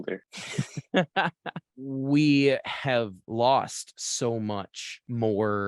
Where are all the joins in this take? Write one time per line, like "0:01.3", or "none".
0:01.7